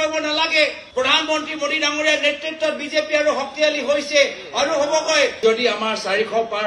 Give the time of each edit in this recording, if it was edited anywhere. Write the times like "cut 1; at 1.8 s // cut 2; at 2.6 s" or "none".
cut 1; at 5.4 s